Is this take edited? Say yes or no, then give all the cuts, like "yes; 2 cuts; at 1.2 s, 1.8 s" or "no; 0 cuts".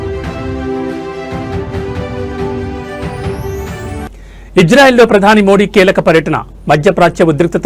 yes; 1 cut; at 4.0 s